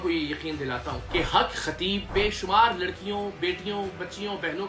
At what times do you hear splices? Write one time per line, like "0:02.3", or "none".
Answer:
0:00.9
0:02.1